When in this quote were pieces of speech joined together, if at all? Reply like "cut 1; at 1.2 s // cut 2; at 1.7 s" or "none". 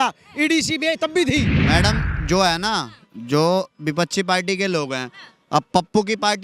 cut 1; at 1.6 s